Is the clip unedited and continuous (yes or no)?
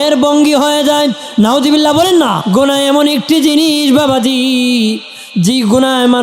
no